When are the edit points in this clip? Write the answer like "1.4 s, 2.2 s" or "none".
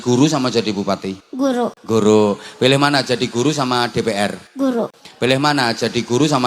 1.6 s, 4.8 s